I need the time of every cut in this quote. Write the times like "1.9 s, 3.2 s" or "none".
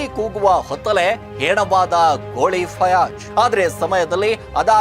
3.2 s